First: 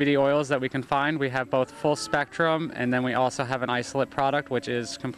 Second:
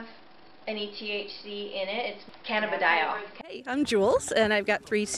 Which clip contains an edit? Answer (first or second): second